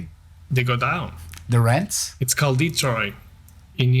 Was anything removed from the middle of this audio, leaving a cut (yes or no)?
no